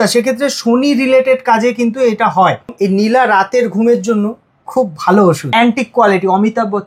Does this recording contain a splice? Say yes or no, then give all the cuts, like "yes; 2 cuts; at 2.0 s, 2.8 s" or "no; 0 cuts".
yes; 2 cuts; at 2.7 s, 5.5 s